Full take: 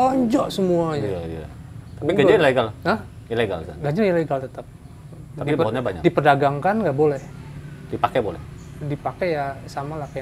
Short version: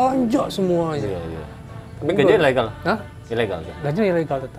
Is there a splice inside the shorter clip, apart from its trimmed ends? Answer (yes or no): no